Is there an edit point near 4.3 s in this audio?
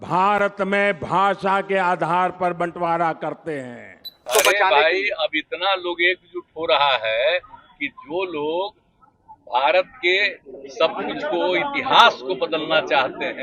yes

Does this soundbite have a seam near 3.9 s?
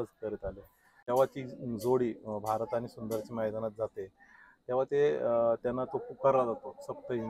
no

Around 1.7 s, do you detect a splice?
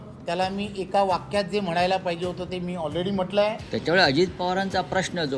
no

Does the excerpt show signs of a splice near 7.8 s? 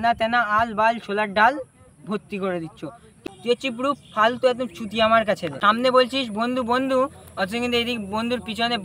no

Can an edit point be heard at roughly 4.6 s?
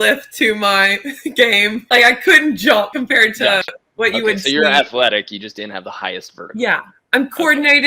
no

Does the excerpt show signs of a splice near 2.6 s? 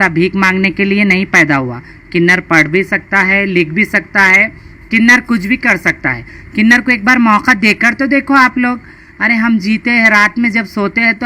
no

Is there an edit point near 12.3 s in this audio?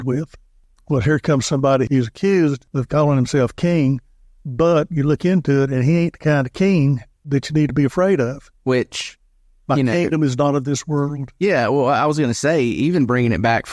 no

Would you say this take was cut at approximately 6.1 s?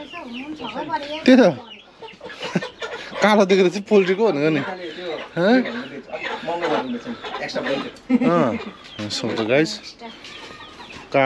no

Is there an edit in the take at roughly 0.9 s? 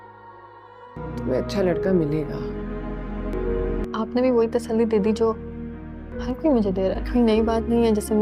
yes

